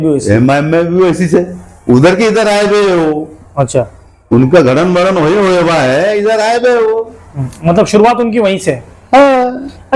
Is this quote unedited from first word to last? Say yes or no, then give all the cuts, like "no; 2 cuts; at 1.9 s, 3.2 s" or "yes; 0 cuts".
yes; 0 cuts